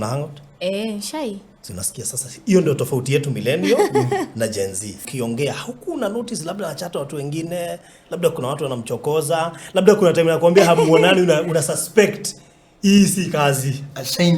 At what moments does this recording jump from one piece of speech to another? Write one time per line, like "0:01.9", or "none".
0:05.0